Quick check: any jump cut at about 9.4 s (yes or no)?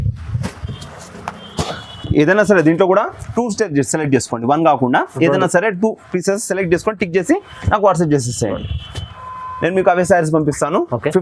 no